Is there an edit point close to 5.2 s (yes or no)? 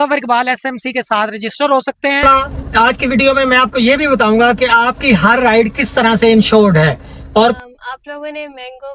no